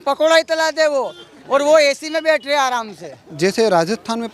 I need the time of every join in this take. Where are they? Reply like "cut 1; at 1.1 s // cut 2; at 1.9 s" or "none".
cut 1; at 3.2 s

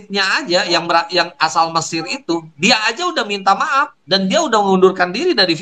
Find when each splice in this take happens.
none

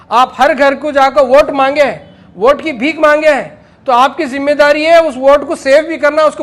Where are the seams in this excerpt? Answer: none

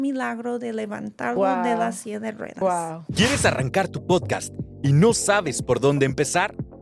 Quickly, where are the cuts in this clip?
none

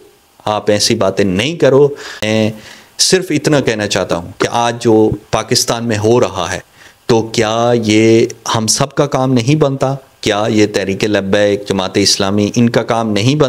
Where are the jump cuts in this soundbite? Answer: cut 1; at 2.1 s

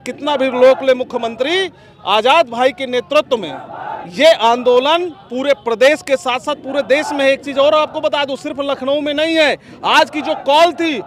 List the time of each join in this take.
none

